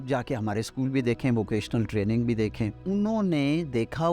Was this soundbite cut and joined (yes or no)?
yes